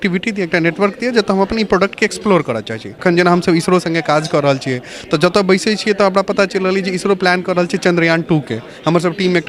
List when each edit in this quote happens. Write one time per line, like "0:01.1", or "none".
0:02.9